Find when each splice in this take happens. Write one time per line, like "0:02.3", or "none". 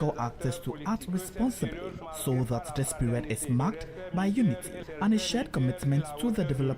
0:02.1
0:04.8